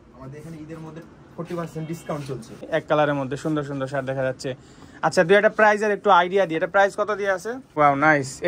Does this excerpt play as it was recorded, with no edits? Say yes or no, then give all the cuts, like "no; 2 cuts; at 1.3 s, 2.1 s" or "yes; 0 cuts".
no; 2 cuts; at 2.6 s, 7.6 s